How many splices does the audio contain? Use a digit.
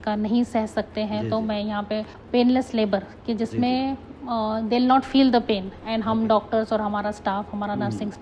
1